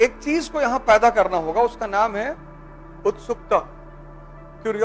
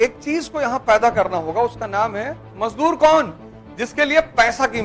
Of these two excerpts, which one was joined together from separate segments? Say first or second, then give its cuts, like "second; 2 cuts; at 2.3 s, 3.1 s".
second; 1 cut; at 2.4 s